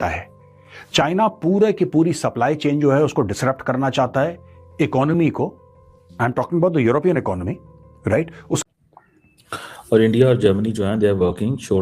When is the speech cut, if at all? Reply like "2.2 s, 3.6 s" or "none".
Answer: 8.6 s